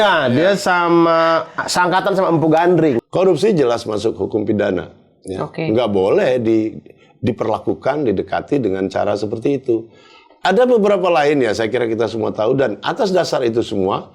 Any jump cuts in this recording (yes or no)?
yes